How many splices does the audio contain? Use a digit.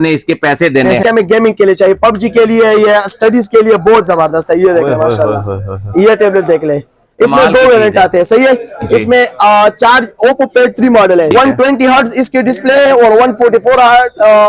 2